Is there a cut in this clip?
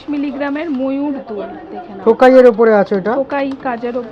no; 0 cuts

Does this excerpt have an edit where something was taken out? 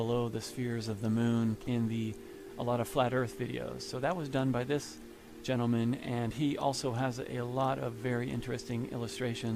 no; 0 cuts

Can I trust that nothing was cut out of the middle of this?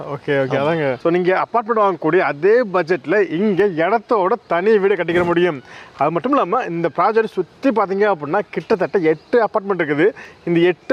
yes; 0 cuts

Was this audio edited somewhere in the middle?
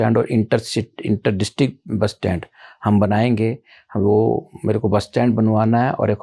no; 0 cuts

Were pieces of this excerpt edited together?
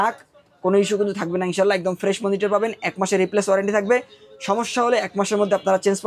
no; 0 cuts

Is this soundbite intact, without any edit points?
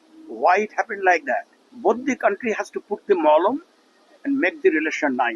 no; 1 cut; at 1.6 s

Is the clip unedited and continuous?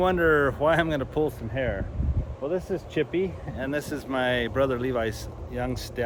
yes; 0 cuts

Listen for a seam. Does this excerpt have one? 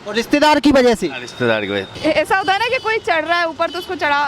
yes; 1 cut; at 1.8 s

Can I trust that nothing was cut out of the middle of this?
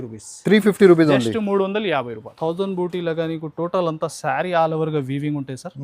no; 1 cut; at 2.2 s

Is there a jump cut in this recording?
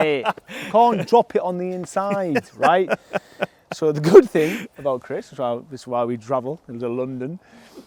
no; 0 cuts

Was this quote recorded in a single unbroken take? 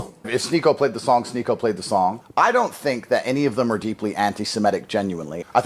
yes; 0 cuts

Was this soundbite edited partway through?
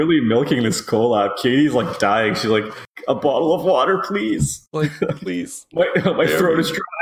no; 0 cuts

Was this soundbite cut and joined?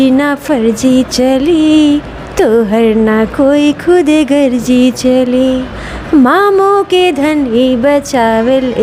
no; 0 cuts

